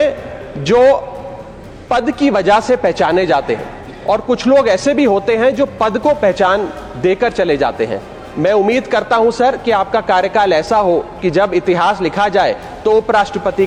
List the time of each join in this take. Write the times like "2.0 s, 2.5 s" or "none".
none